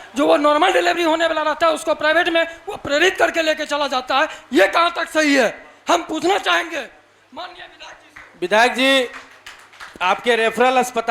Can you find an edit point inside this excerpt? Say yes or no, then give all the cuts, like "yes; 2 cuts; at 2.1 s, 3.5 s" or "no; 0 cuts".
no; 0 cuts